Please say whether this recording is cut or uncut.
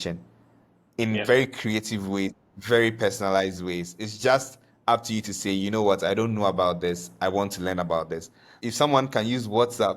cut